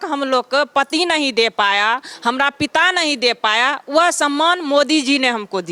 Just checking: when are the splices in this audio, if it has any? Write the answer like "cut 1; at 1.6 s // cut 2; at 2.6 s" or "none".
none